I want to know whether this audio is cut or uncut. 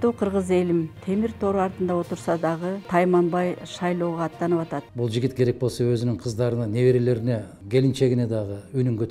cut